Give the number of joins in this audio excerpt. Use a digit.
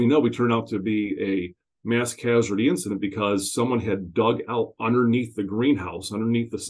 0